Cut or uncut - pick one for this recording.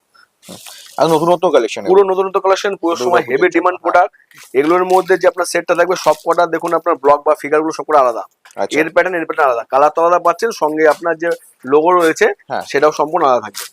uncut